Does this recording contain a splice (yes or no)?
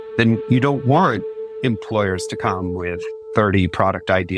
yes